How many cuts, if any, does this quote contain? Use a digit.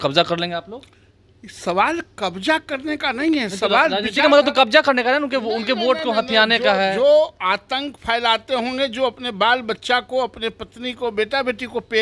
0